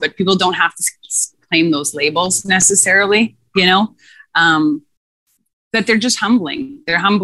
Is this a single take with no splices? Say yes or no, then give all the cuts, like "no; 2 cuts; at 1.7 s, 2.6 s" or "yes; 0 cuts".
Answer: yes; 0 cuts